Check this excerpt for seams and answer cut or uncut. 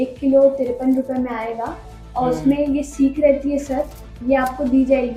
uncut